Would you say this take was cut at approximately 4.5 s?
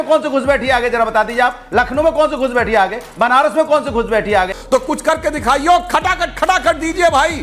yes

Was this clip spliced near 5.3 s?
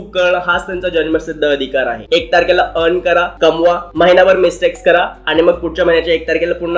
no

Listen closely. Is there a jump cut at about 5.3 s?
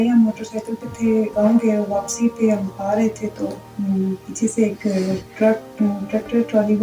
yes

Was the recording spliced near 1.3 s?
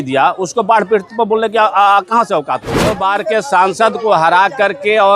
no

